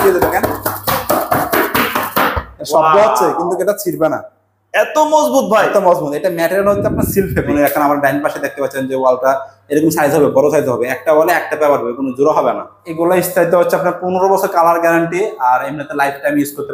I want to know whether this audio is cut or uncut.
cut